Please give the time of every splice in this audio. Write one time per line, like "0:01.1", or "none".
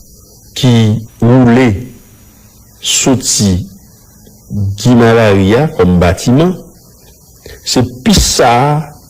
0:01.1

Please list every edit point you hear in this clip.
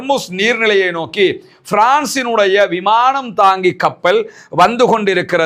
none

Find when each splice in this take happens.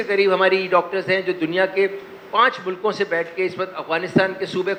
none

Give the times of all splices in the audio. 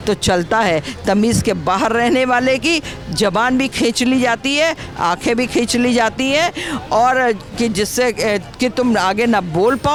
none

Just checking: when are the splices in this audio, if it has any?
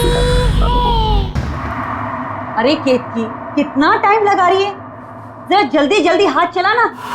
0:01.3

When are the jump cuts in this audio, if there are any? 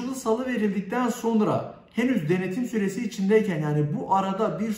none

